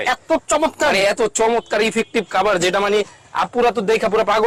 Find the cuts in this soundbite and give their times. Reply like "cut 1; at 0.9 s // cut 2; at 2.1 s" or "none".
none